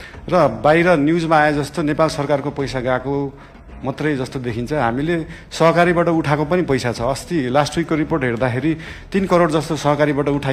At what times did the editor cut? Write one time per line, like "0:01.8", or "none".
none